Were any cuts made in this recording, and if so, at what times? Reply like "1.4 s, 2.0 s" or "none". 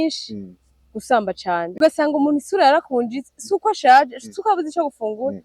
1.8 s

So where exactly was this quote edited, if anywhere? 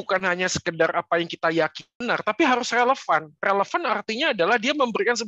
1.9 s

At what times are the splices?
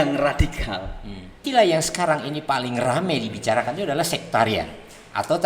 1.4 s

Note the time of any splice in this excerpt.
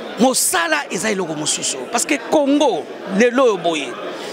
none

